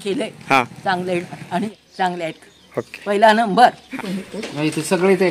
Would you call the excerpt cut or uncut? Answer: cut